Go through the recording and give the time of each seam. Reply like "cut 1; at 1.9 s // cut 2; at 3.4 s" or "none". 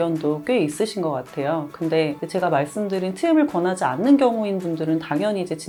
none

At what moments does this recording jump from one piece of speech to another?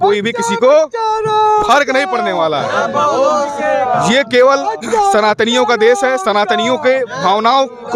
none

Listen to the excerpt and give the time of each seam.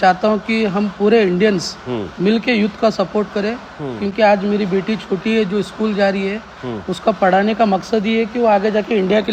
none

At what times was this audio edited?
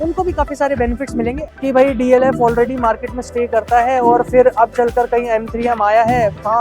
cut 1; at 1.4 s

